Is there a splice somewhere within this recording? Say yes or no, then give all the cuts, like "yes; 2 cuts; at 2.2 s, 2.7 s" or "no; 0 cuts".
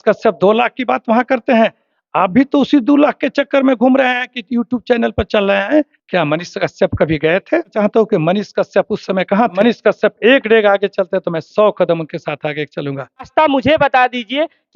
yes; 5 cuts; at 1.9 s, 6.0 s, 7.7 s, 9.5 s, 13.3 s